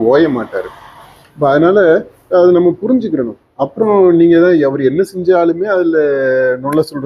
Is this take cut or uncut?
uncut